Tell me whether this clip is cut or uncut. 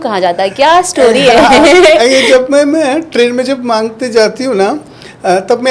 uncut